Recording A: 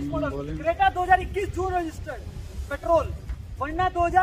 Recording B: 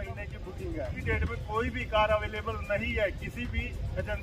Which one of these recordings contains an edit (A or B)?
B